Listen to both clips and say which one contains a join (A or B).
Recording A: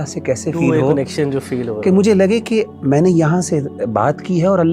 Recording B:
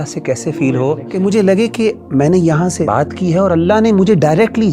B